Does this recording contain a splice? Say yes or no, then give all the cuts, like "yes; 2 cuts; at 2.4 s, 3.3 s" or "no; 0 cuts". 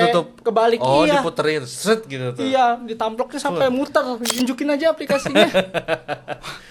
yes; 1 cut; at 4.4 s